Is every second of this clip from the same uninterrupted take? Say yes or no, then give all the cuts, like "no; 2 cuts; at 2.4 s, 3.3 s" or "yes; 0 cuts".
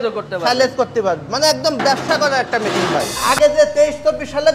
no; 1 cut; at 3.3 s